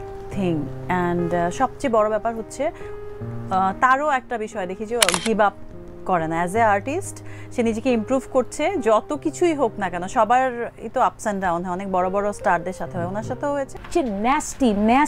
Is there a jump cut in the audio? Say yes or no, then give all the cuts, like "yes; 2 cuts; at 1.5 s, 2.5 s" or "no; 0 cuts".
yes; 1 cut; at 13.8 s